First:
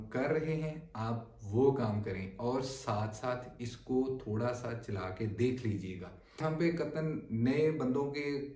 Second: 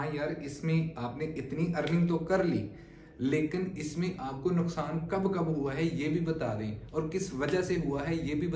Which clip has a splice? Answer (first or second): first